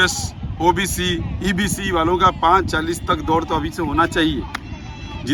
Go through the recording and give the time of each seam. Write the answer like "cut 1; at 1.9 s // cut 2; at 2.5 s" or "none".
none